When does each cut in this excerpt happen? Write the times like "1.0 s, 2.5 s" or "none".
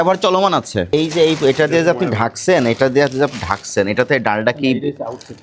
0.9 s

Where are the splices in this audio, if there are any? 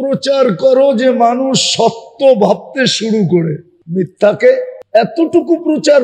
3.7 s, 4.8 s

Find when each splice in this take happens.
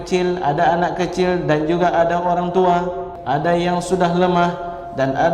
3.1 s

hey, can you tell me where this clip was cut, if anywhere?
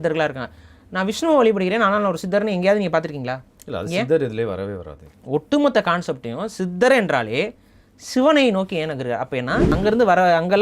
9.7 s

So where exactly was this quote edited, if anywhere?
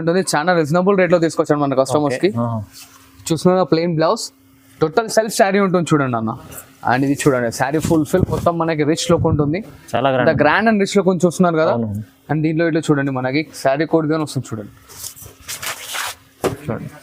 none

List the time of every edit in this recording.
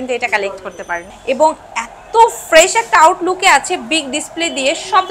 1.1 s

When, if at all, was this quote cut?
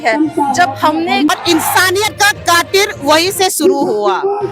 1.3 s

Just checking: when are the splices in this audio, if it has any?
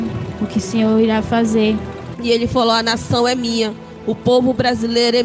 2.0 s

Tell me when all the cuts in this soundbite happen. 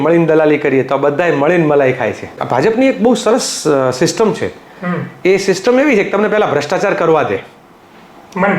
2.4 s

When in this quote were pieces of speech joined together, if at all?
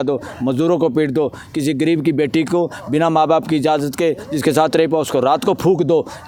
none

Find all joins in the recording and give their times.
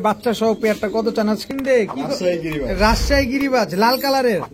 1.4 s

